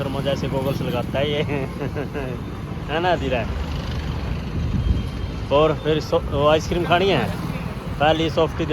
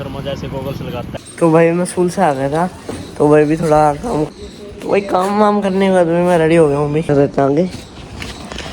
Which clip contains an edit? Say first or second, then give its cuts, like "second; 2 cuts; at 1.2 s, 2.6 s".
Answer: second; 3 cuts; at 1.2 s, 4.2 s, 7.1 s